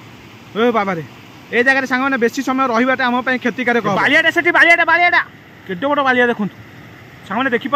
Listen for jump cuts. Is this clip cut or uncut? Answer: cut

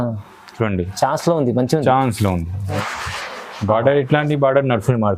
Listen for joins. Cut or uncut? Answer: cut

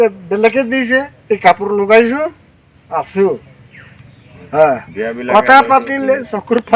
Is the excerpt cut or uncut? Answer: uncut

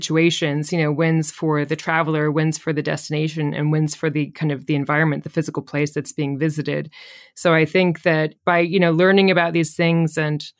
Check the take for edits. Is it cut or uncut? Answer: uncut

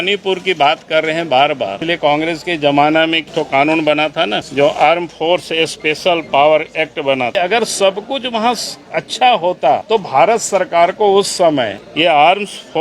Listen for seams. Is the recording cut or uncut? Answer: cut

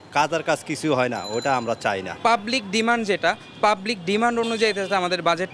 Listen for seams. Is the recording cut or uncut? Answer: cut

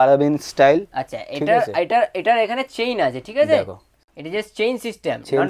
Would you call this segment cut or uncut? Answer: uncut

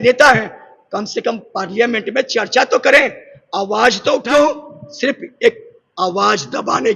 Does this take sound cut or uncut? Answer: cut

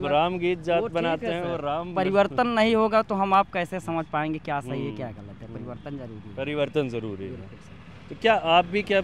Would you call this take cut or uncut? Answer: uncut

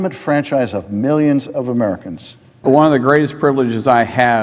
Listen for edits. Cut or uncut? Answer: uncut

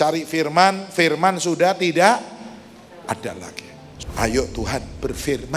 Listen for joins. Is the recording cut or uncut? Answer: cut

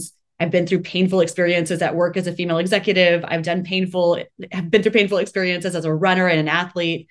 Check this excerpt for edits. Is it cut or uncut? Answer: uncut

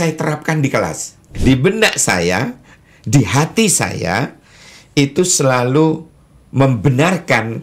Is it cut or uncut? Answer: cut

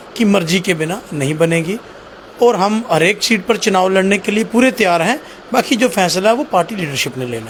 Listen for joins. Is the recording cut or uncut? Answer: uncut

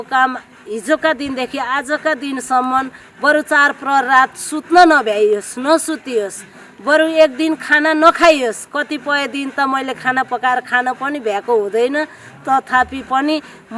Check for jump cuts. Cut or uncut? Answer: uncut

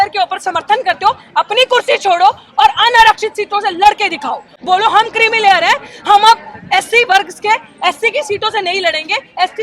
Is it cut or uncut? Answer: uncut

